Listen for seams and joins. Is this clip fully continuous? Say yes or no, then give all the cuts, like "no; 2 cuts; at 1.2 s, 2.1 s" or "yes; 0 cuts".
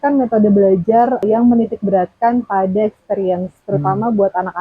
no; 1 cut; at 1.2 s